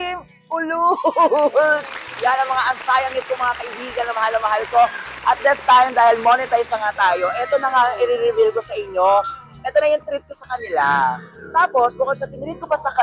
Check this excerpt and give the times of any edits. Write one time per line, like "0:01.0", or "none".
none